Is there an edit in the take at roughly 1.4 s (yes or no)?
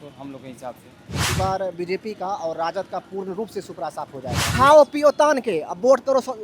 yes